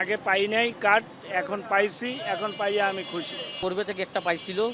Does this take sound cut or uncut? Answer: cut